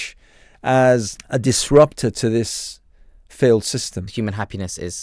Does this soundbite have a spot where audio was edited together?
yes; 2 cuts; at 1.2 s, 4.1 s

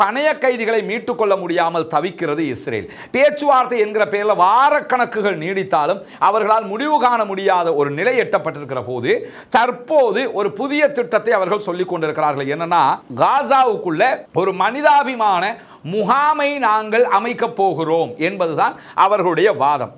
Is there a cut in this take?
no; 0 cuts

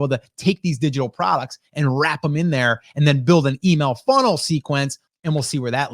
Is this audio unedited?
no; 1 cut; at 5.0 s

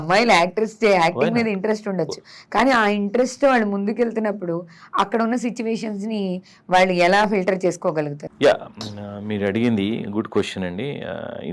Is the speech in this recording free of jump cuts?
no; 1 cut; at 8.2 s

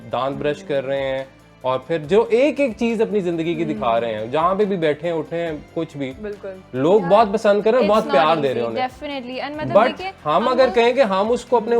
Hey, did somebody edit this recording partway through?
no; 0 cuts

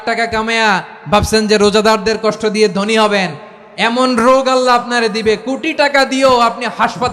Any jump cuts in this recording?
no; 0 cuts

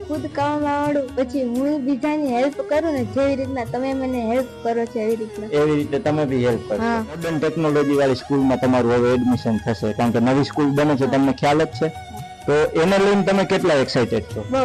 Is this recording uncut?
yes; 0 cuts

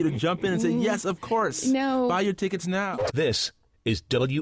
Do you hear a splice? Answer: yes; 1 cut; at 2.9 s

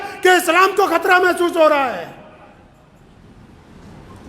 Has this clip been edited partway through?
no; 0 cuts

